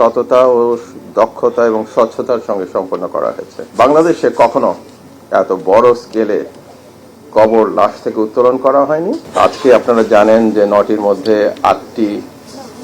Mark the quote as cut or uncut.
cut